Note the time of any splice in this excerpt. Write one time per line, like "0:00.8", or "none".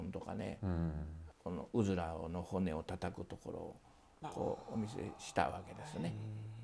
0:01.2